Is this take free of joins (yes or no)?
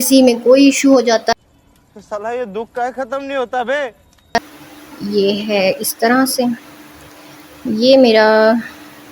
no